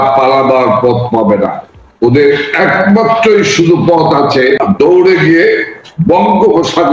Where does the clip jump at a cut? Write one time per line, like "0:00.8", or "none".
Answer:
0:04.6